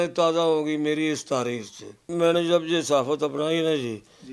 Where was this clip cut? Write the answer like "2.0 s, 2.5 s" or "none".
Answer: 2.0 s